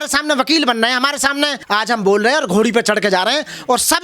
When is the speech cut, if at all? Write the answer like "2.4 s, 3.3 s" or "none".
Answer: 1.6 s